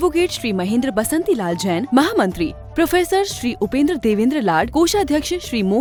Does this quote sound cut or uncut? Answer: uncut